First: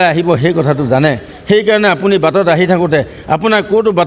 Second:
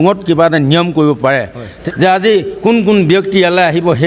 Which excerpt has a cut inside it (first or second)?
second